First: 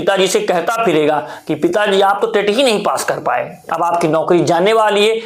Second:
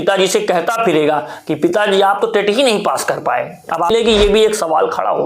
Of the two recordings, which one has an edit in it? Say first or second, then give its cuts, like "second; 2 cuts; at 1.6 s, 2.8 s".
second; 1 cut; at 3.9 s